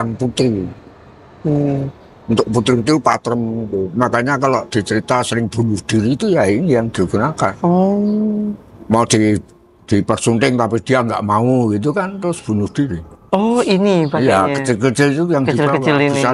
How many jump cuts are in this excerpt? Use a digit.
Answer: 0